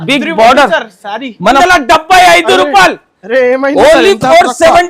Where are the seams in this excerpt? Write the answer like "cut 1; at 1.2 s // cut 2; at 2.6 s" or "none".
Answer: cut 1; at 1.6 s